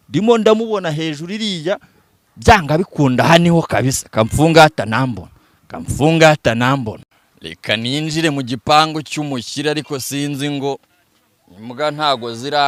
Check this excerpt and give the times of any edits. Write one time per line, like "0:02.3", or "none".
none